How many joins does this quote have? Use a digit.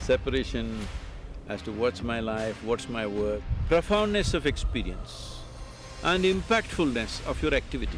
1